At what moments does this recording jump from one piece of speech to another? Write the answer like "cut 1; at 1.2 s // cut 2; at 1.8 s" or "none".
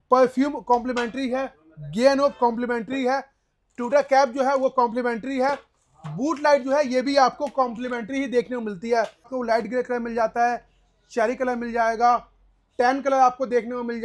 cut 1; at 9.3 s